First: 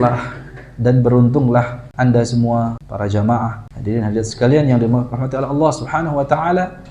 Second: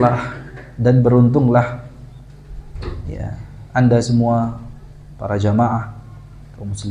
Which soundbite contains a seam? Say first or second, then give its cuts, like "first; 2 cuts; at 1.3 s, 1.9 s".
first; 3 cuts; at 1.8 s, 2.8 s, 3.7 s